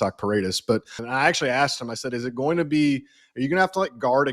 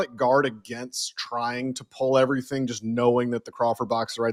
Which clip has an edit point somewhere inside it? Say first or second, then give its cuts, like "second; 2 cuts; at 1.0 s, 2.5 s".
first; 1 cut; at 1.0 s